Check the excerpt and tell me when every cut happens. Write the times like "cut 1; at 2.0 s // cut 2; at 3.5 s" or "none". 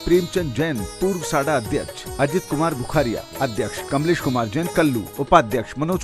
cut 1; at 3.8 s // cut 2; at 5.1 s